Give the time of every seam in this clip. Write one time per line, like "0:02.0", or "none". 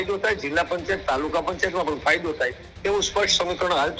none